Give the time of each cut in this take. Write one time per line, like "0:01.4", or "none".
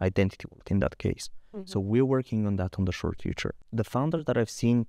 0:03.6